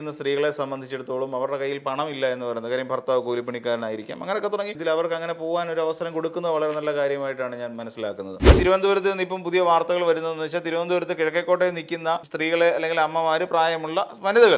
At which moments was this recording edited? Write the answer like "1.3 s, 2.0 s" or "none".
4.8 s, 8.6 s, 12.3 s